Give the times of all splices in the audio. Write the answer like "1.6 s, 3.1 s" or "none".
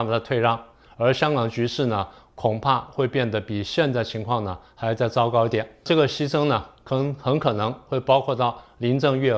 5.8 s